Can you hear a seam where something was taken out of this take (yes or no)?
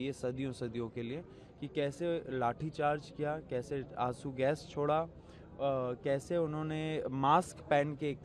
no